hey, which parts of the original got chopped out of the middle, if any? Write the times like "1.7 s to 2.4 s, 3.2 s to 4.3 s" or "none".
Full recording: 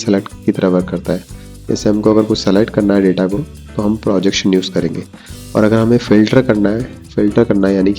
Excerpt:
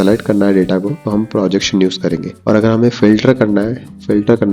3.4 s to 3.7 s, 5.0 s to 5.4 s